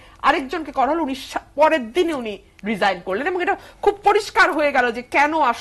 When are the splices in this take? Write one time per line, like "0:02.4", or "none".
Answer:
none